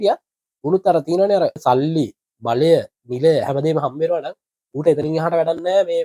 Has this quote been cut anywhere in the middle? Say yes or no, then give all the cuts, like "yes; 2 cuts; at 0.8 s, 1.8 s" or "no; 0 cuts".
yes; 1 cut; at 1.6 s